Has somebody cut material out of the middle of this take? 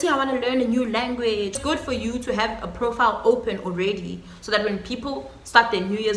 yes; 1 cut; at 1.5 s

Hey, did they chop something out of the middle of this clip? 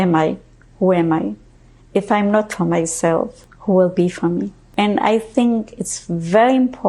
yes; 2 cuts; at 3.4 s, 4.6 s

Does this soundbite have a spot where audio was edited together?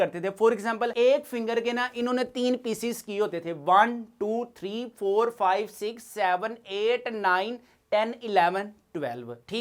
no; 0 cuts

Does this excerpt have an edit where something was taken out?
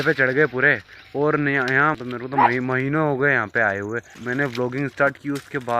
yes; 2 cuts; at 2.0 s, 4.1 s

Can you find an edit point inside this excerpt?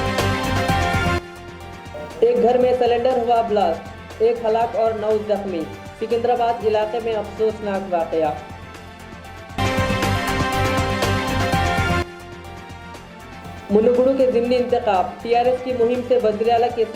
no; 0 cuts

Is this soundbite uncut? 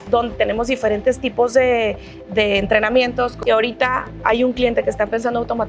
no; 1 cut; at 3.4 s

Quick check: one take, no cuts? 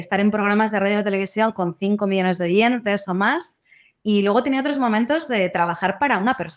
yes; 0 cuts

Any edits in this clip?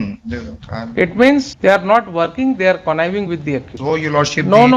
yes; 2 cuts; at 1.5 s, 3.7 s

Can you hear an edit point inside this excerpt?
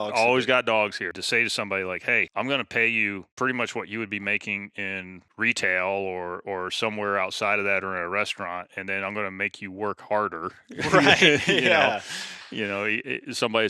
yes; 4 cuts; at 1.1 s, 2.3 s, 3.3 s, 5.2 s

